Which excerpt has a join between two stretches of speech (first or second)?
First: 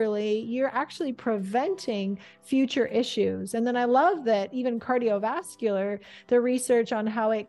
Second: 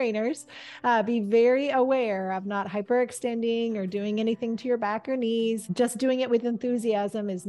second